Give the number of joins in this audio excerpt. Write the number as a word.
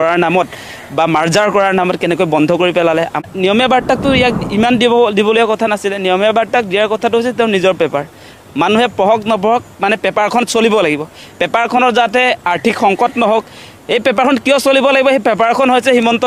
one